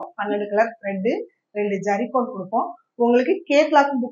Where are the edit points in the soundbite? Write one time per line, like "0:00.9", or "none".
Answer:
none